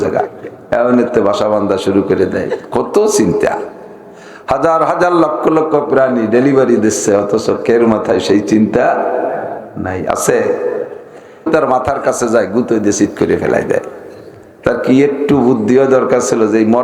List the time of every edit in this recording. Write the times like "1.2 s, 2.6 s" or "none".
11.5 s